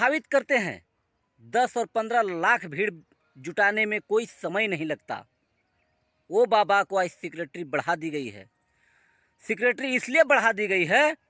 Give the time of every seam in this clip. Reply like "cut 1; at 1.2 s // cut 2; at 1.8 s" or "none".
none